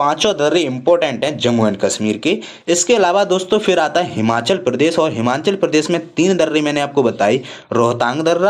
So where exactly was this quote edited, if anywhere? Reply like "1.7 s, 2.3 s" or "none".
none